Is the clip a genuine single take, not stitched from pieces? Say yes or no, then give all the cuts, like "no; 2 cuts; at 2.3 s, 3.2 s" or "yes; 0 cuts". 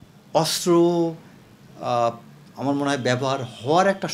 yes; 0 cuts